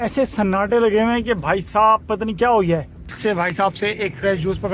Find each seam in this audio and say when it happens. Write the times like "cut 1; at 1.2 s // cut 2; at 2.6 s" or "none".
cut 1; at 3.0 s

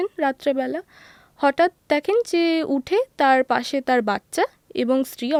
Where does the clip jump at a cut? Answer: none

